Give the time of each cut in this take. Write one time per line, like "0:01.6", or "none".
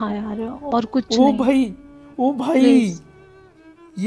none